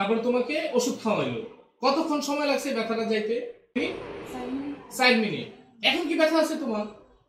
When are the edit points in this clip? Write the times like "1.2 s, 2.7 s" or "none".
3.8 s